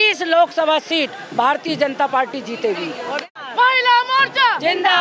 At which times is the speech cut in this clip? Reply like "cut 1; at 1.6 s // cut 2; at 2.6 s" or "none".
cut 1; at 3.4 s